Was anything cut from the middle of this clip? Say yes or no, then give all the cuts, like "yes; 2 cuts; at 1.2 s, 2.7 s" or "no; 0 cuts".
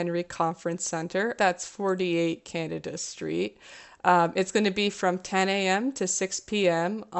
yes; 1 cut; at 1.3 s